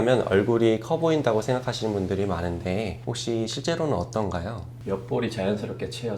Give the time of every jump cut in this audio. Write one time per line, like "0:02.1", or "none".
0:03.1
0:04.7

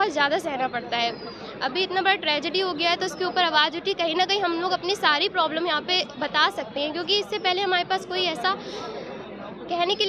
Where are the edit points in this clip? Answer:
none

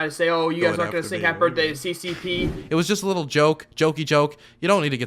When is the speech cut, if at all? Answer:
0:02.6

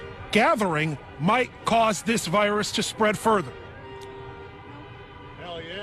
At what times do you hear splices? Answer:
none

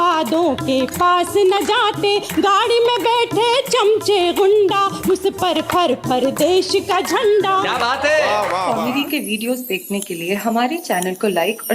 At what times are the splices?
0:08.8

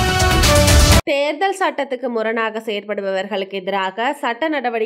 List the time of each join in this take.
0:01.0

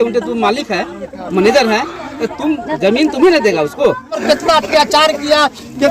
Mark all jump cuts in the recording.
0:04.1

